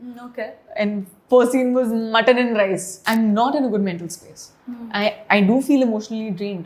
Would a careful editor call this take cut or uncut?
cut